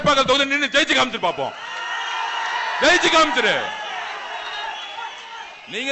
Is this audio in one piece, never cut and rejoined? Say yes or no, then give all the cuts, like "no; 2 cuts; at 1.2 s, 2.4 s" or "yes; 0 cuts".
yes; 0 cuts